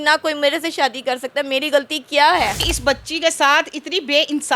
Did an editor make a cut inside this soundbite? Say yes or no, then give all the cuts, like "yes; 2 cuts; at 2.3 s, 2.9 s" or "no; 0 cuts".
yes; 1 cut; at 2.7 s